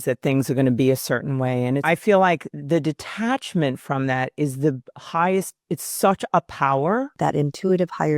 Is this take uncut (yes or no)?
no